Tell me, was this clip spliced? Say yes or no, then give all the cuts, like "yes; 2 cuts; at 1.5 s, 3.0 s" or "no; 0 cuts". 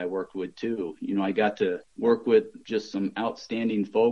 yes; 2 cuts; at 1.9 s, 2.6 s